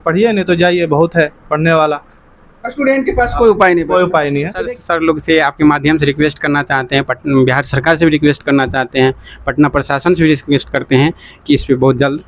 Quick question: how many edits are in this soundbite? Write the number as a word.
one